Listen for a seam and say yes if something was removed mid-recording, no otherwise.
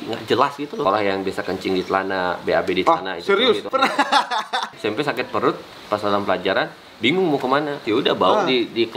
yes